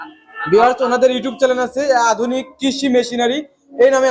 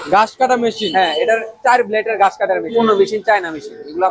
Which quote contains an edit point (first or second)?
second